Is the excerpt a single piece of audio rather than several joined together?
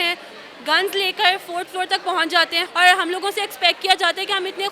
no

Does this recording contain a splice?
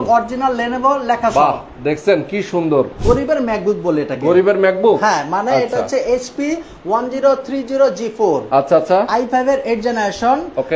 yes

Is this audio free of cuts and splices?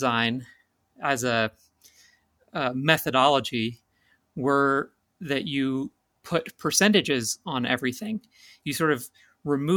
yes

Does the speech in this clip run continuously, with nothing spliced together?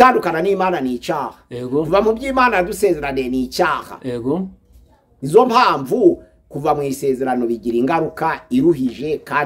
yes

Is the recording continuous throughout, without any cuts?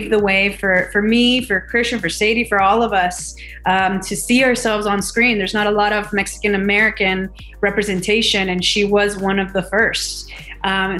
yes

